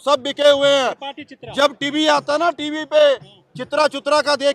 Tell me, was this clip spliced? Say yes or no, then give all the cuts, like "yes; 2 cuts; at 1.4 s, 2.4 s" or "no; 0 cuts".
no; 0 cuts